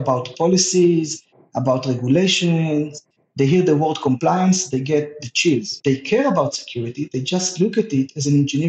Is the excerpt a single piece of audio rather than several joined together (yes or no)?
no